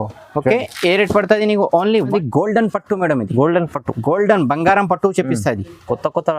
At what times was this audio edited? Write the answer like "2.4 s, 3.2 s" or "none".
2.1 s